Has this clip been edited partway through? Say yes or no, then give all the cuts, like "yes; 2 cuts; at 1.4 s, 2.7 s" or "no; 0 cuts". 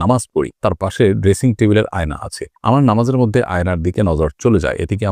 no; 0 cuts